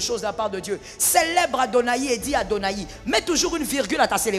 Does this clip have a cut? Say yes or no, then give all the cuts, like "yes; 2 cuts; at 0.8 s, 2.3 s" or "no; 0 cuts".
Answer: no; 0 cuts